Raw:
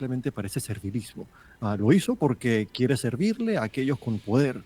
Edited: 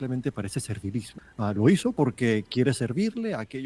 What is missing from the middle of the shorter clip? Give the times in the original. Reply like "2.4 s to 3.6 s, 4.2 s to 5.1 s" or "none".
1.2 s to 1.4 s